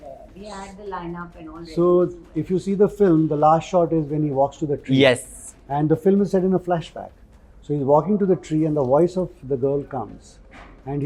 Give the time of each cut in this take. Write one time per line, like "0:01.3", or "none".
none